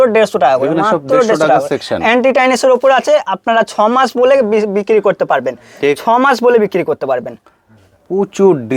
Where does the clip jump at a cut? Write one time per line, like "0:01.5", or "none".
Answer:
none